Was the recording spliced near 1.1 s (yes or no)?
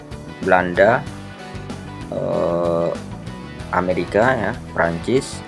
no